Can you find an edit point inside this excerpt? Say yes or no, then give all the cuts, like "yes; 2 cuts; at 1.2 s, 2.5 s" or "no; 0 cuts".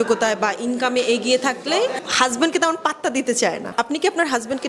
yes; 1 cut; at 3.7 s